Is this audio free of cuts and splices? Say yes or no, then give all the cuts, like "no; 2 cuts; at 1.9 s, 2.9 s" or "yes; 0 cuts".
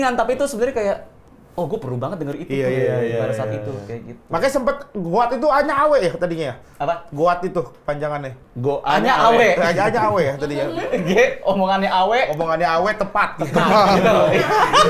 yes; 0 cuts